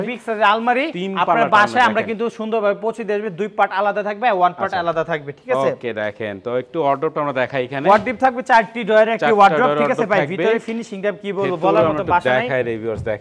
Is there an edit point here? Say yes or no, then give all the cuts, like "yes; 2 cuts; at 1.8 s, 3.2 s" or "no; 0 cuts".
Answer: no; 0 cuts